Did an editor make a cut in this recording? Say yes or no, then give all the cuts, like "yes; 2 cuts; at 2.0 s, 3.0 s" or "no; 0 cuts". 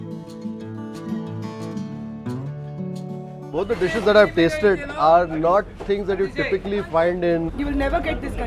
no; 0 cuts